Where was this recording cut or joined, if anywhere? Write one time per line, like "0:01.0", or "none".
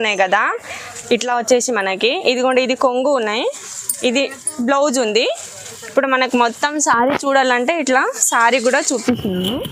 none